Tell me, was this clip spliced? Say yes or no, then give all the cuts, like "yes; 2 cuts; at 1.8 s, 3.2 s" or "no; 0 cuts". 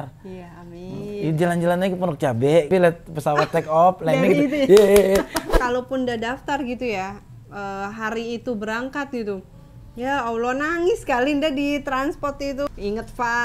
yes; 3 cuts; at 2.7 s, 5.4 s, 12.7 s